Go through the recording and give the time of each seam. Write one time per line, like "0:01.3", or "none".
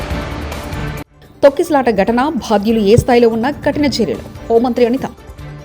0:01.0